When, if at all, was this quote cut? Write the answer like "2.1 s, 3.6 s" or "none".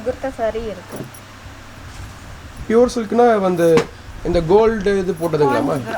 2.6 s